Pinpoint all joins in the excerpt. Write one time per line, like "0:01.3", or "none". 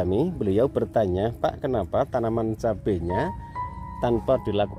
none